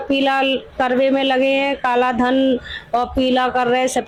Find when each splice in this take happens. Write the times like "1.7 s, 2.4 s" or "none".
none

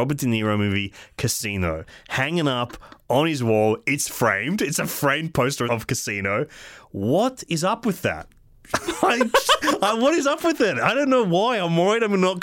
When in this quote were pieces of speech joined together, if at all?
none

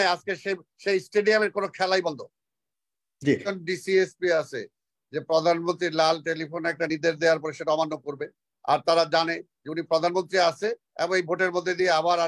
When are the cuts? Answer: 3.5 s

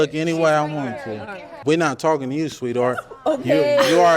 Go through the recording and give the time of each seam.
1.5 s

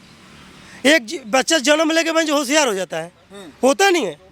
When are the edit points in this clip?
none

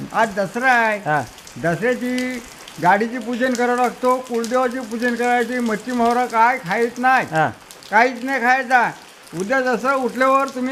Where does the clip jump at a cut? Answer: none

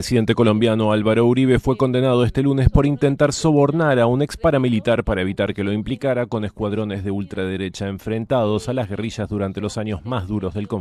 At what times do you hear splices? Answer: none

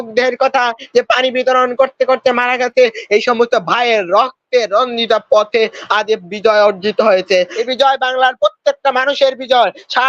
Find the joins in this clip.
7.7 s

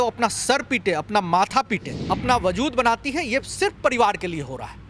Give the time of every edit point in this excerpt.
1.9 s

